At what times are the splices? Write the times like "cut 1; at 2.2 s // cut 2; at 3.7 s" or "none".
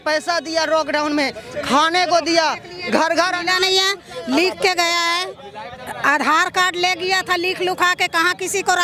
none